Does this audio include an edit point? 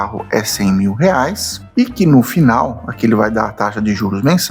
no; 0 cuts

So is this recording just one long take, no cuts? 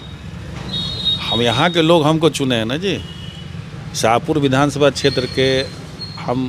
yes; 0 cuts

